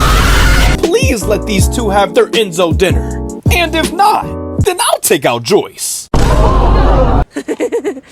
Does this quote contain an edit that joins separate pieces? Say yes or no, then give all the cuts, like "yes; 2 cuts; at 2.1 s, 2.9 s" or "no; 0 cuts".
yes; 2 cuts; at 0.8 s, 7.2 s